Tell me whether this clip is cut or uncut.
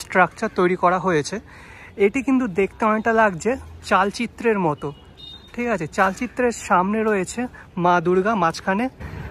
uncut